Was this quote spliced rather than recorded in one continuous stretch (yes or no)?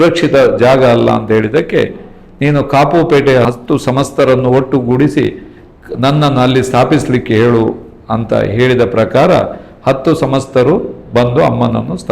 yes